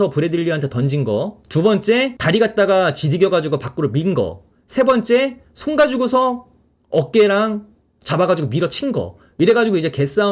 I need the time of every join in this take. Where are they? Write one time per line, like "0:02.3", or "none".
0:01.4
0:02.2

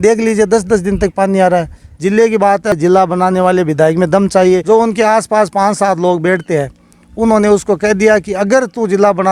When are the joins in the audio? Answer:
0:01.8
0:02.8
0:04.6

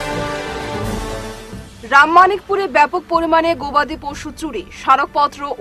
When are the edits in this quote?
0:01.1

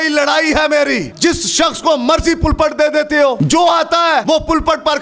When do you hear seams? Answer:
0:01.1
0:03.4
0:04.2

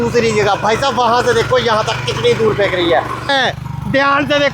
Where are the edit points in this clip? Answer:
0:03.3

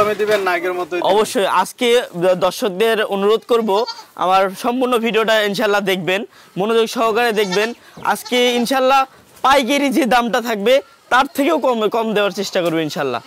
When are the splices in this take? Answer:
none

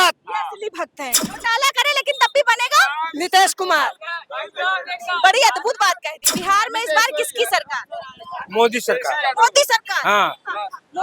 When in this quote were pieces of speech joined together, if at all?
0:01.2
0:06.1

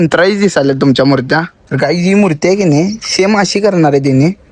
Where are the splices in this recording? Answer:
0:01.6

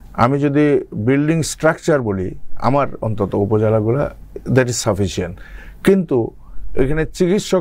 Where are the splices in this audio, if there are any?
none

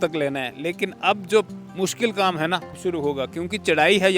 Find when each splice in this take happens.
0:02.8

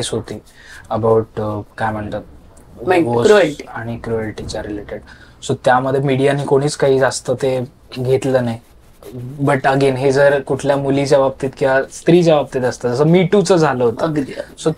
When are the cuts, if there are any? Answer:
none

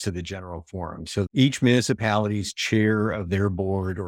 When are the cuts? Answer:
0:01.3

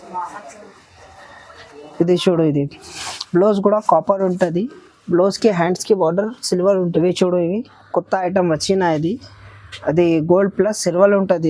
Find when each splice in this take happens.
0:06.9

